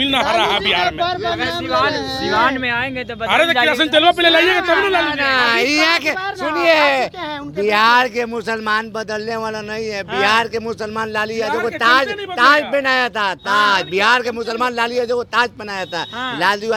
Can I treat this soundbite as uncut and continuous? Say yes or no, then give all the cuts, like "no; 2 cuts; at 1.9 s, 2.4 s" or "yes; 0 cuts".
yes; 0 cuts